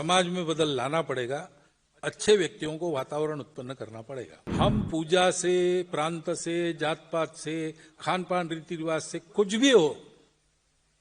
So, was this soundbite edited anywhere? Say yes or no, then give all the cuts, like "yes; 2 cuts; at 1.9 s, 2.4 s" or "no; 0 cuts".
yes; 1 cut; at 4.4 s